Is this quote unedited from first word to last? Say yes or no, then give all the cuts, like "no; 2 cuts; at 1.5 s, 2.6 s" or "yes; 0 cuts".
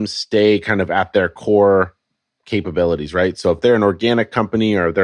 yes; 0 cuts